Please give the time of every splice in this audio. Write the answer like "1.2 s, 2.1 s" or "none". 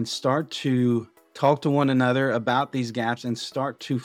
1.2 s

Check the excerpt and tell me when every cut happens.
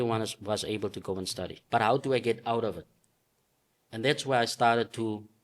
1.6 s

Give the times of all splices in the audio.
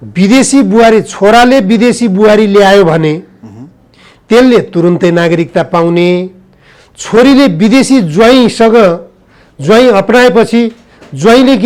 none

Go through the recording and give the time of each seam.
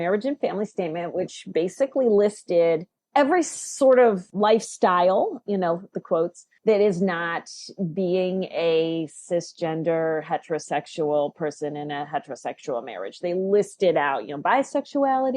2.9 s, 4.3 s, 6.5 s

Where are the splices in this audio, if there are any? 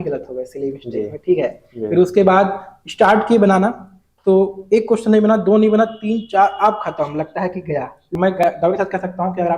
8.0 s

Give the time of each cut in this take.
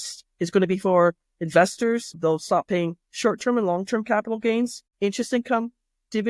2.2 s, 4.8 s

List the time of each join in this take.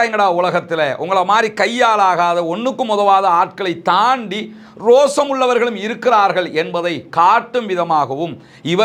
none

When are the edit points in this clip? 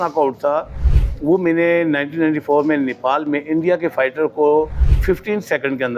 none

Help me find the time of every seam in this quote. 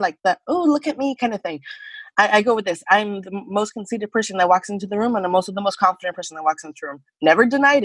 none

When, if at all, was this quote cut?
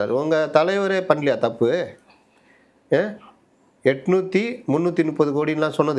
none

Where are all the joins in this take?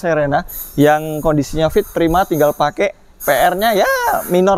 none

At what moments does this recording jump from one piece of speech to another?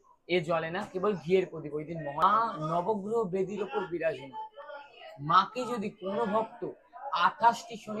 2.2 s

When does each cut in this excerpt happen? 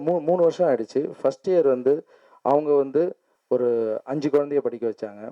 3.3 s

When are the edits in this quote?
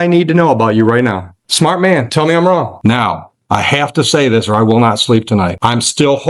1.4 s, 2.7 s, 5.5 s

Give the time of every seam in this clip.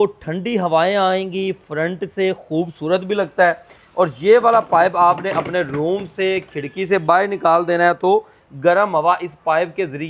none

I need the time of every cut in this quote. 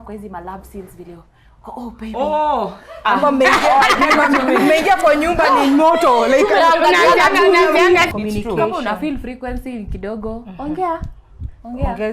8.1 s

